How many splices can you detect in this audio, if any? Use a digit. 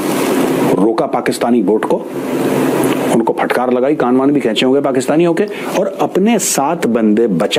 0